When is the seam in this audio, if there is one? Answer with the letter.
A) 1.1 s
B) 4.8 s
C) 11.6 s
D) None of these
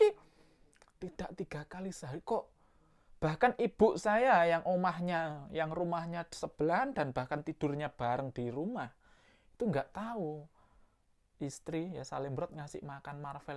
D